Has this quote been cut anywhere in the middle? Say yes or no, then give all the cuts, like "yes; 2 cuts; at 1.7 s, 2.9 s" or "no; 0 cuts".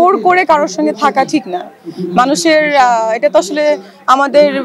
no; 0 cuts